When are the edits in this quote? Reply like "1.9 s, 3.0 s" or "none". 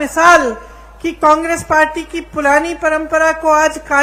none